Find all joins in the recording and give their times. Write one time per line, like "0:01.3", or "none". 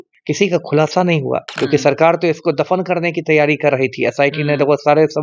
0:01.5